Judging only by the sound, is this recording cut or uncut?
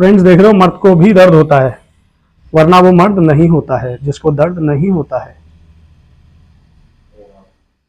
uncut